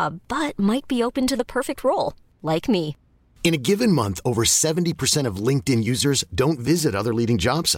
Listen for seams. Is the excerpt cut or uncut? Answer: uncut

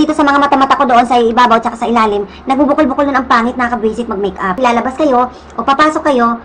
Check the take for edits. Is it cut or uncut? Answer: cut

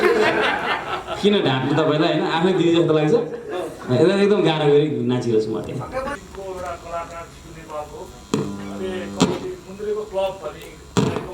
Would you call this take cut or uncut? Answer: uncut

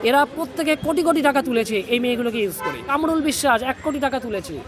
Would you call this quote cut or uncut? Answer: cut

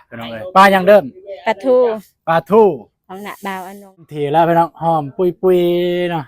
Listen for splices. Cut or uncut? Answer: cut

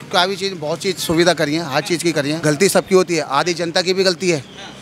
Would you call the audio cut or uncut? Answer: cut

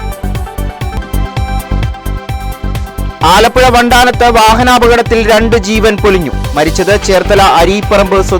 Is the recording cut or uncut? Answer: cut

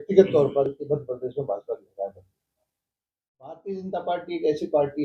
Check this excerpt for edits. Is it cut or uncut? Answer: cut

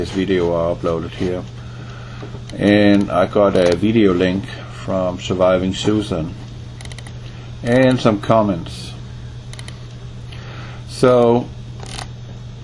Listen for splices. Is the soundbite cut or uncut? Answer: cut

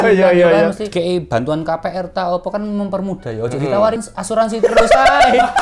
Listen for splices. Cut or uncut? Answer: cut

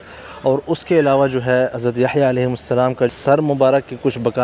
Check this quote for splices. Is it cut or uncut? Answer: cut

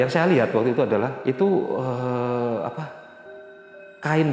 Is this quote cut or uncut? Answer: cut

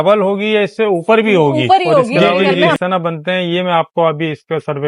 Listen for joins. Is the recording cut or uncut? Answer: cut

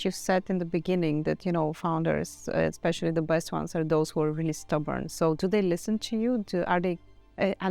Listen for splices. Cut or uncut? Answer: uncut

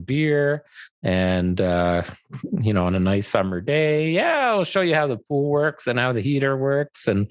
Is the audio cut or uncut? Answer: uncut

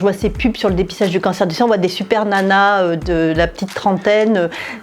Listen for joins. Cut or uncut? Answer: uncut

